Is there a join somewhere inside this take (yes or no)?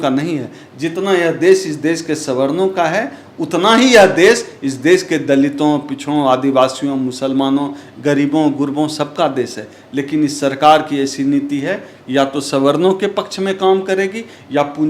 no